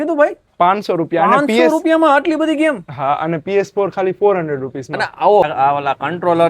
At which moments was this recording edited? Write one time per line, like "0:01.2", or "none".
0:05.4